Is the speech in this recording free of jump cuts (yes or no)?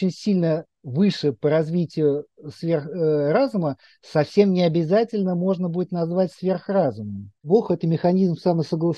no